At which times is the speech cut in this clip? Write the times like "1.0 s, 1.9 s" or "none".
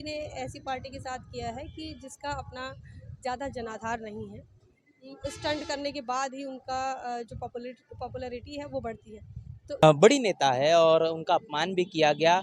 9.8 s